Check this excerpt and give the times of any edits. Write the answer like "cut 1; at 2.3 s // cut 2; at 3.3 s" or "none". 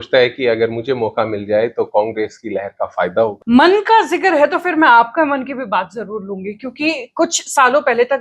cut 1; at 3.4 s

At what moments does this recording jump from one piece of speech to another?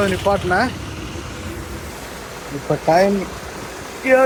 none

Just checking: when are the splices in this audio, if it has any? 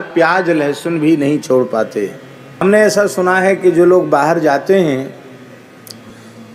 cut 1; at 2.6 s

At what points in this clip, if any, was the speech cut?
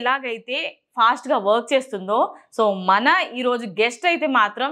none

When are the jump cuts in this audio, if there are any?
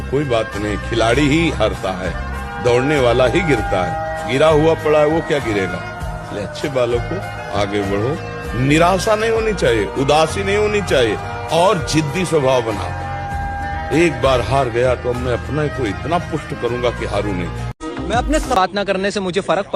none

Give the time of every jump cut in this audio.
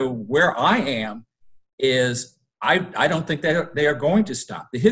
none

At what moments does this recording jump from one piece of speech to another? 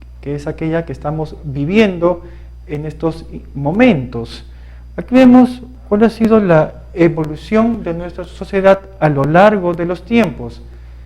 cut 1; at 7.4 s

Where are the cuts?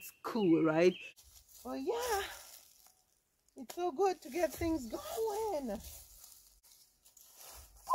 cut 1; at 1.1 s // cut 2; at 6.5 s

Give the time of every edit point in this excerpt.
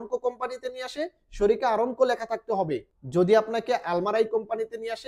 cut 1; at 2.9 s

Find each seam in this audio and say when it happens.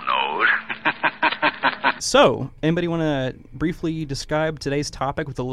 cut 1; at 2.0 s

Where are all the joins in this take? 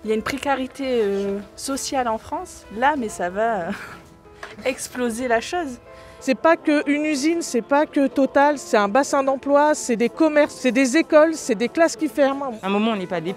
cut 1; at 6.1 s // cut 2; at 8.6 s // cut 3; at 10.5 s // cut 4; at 12.5 s

